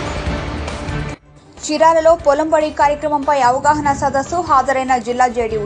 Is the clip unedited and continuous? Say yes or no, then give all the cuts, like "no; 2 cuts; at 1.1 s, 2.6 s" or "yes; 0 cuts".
no; 1 cut; at 1.2 s